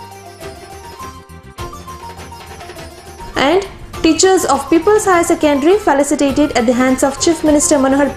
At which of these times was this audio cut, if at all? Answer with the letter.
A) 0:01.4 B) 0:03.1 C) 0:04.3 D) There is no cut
D